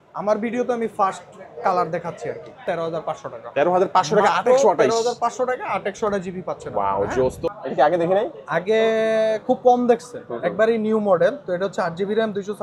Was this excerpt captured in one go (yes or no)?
no